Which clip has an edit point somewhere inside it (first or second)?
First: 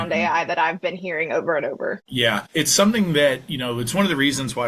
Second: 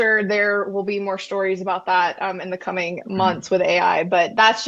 first